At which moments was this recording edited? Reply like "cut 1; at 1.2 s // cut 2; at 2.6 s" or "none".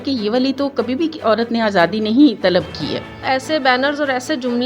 cut 1; at 3.2 s

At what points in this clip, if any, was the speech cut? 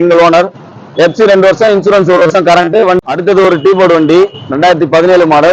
cut 1; at 3.0 s

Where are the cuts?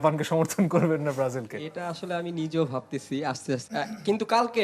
cut 1; at 3.6 s

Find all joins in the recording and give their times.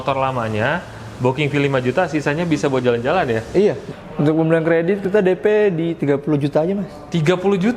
cut 1; at 3.9 s

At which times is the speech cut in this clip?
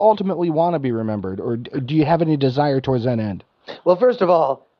none

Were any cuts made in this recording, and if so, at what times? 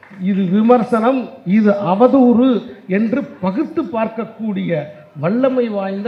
none

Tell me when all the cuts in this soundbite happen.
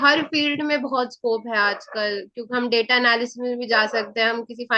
none

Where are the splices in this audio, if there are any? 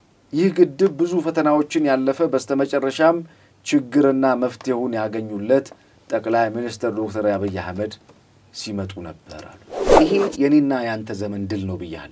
cut 1; at 9.9 s

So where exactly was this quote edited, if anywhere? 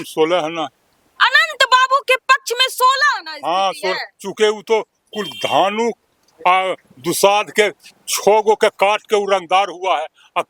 none

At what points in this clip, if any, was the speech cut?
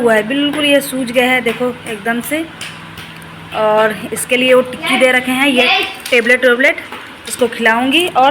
none

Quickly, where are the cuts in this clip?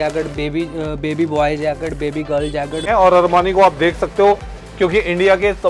cut 1; at 2.9 s

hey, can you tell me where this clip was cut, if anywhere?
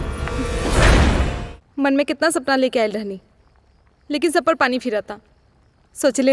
cut 1; at 1.4 s

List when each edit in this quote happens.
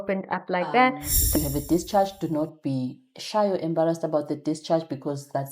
cut 1; at 1.3 s

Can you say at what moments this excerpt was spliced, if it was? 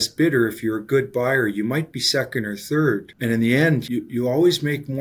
cut 1; at 3.1 s // cut 2; at 3.8 s

